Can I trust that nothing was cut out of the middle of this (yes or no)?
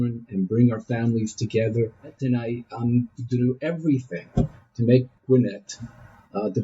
no